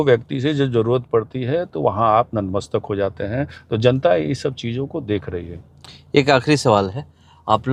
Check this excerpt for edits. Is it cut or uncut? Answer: uncut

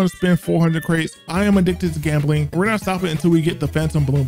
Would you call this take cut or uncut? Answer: cut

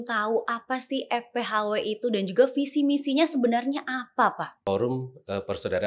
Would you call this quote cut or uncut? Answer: cut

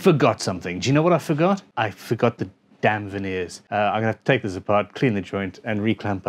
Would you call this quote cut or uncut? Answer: cut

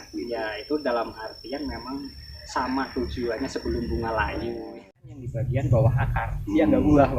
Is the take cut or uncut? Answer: cut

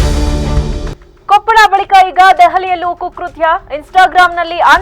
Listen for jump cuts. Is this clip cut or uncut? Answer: cut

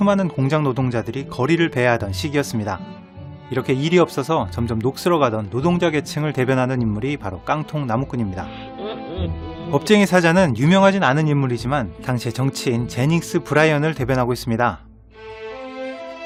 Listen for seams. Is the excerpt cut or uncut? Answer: uncut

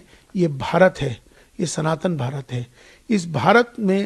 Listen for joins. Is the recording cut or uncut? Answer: uncut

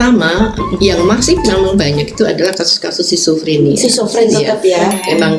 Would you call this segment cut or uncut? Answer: uncut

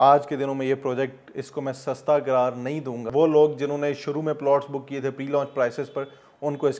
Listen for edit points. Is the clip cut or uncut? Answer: cut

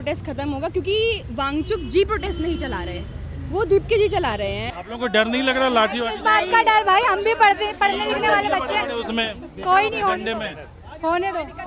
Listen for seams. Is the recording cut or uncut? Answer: cut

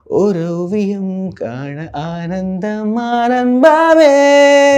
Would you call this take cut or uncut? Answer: uncut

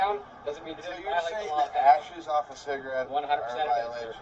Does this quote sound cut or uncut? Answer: cut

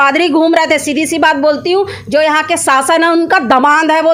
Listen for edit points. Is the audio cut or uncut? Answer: uncut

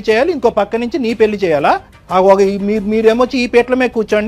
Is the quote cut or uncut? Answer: cut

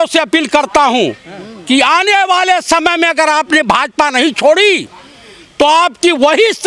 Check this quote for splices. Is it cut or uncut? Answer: uncut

